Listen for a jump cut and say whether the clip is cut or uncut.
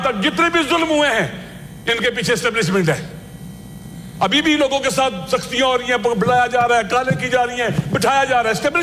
uncut